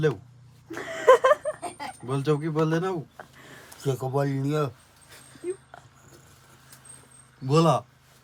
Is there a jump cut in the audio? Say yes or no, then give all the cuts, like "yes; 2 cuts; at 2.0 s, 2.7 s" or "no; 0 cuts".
no; 0 cuts